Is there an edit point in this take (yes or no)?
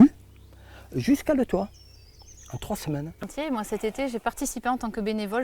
yes